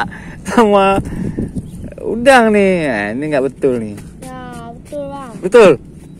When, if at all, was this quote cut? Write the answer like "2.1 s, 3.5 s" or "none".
none